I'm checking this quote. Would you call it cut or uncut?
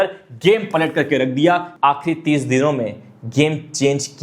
cut